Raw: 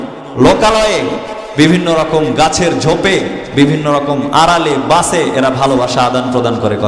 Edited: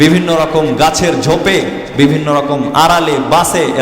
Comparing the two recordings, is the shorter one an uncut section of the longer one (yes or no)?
yes